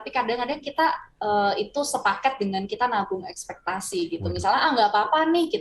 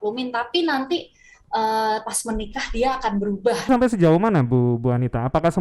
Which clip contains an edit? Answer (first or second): second